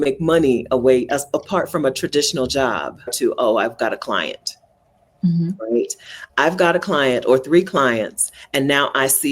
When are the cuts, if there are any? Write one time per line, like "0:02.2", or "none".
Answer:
0:03.1